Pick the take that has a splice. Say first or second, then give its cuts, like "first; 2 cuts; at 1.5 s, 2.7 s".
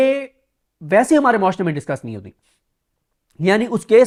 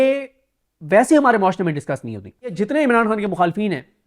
second; 1 cut; at 2.5 s